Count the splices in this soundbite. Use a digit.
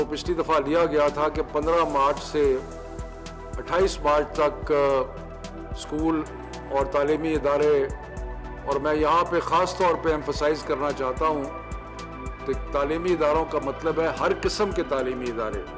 0